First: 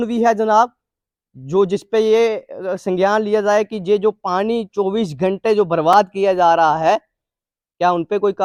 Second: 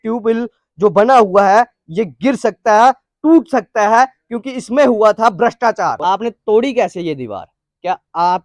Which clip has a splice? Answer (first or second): second